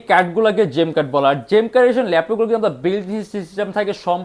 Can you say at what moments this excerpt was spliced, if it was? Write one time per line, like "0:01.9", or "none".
none